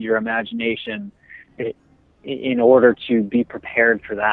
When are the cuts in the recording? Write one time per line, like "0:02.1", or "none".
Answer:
0:01.5